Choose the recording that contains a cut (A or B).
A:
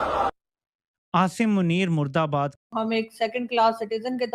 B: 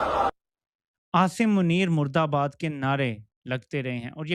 A